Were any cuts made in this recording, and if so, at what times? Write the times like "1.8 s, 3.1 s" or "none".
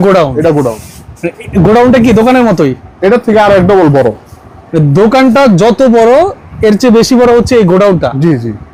none